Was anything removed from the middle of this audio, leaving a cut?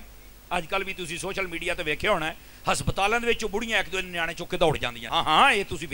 yes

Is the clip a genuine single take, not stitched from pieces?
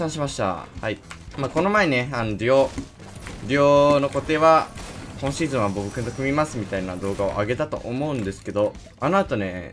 yes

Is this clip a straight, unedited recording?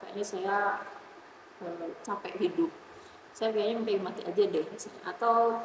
yes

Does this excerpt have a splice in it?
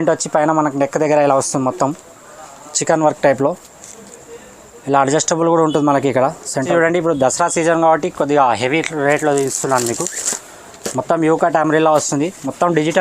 yes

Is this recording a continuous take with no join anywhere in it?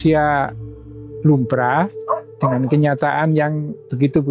yes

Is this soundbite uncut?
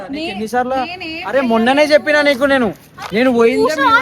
yes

